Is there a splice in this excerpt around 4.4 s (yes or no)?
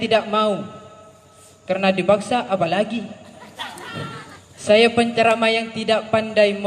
yes